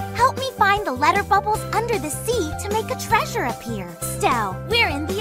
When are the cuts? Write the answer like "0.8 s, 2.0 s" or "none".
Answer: 4.1 s